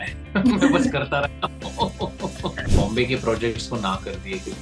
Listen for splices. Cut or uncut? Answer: cut